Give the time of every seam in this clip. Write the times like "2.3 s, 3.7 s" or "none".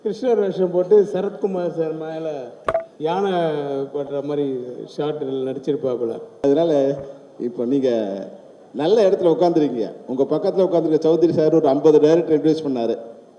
6.3 s